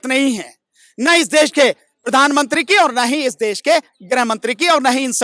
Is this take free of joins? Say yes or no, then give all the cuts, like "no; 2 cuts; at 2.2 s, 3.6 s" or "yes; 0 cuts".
yes; 0 cuts